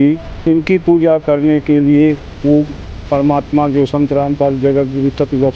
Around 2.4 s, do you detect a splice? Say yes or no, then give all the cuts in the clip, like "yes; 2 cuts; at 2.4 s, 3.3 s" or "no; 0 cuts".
no; 0 cuts